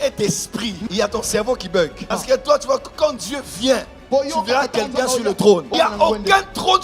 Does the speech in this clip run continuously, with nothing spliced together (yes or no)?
yes